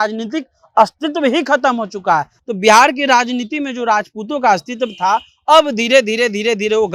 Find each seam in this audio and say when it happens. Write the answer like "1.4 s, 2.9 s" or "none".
2.3 s